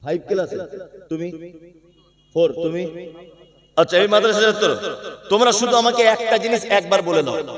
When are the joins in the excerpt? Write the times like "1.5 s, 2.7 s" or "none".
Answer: none